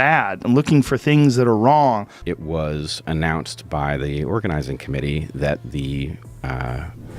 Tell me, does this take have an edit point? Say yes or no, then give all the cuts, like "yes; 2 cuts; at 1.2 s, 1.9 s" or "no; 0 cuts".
yes; 1 cut; at 2.2 s